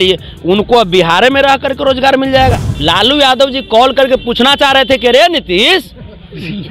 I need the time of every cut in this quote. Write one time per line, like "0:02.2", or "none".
0:02.7